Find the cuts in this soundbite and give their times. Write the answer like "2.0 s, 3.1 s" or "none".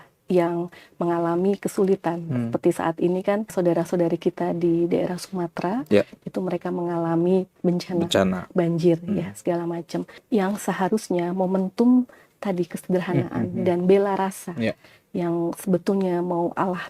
3.5 s, 7.5 s, 10.1 s